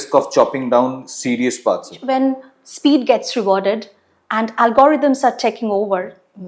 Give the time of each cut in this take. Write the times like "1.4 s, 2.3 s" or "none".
2.0 s